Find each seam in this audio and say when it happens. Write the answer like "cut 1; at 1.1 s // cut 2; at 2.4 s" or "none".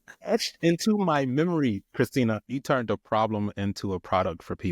cut 1; at 2.5 s